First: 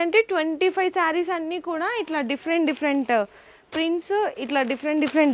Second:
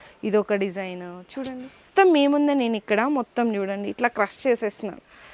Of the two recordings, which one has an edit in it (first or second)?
second